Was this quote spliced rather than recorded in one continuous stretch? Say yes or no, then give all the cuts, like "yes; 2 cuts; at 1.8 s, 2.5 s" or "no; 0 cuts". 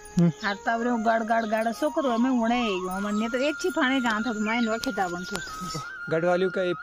yes; 1 cut; at 5.8 s